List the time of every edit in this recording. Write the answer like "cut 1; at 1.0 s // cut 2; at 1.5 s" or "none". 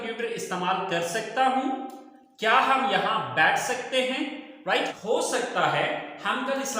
cut 1; at 5.0 s